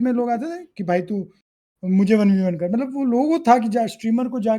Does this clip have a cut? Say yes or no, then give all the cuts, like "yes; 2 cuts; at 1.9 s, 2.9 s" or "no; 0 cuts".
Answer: no; 0 cuts